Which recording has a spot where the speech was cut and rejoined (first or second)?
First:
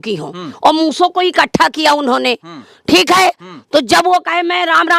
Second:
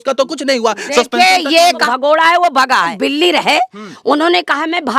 second